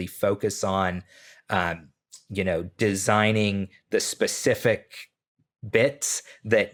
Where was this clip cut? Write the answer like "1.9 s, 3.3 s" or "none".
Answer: none